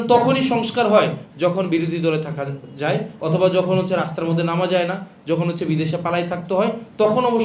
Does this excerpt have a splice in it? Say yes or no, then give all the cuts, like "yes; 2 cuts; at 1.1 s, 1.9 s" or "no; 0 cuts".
no; 0 cuts